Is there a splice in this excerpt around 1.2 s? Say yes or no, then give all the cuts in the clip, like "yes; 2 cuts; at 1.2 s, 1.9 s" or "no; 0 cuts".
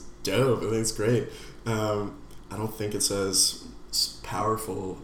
no; 1 cut; at 2.4 s